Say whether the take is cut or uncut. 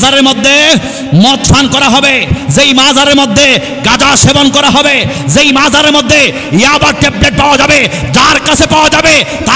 uncut